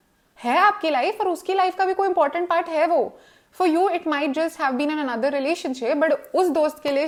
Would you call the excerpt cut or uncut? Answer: uncut